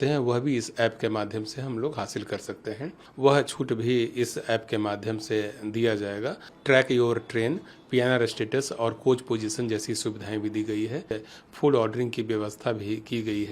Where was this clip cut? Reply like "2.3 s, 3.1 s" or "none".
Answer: 3.0 s, 6.5 s, 11.1 s